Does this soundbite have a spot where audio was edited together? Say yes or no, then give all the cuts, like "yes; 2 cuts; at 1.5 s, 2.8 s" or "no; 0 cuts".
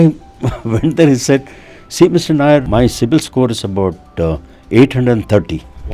yes; 1 cut; at 2.7 s